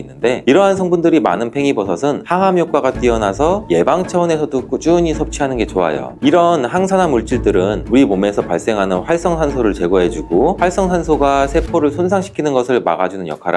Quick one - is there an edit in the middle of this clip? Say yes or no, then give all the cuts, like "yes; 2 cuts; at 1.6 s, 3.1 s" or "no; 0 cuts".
no; 0 cuts